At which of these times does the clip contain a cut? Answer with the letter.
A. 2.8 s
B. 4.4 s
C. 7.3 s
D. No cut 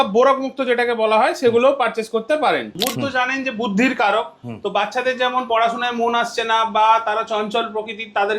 A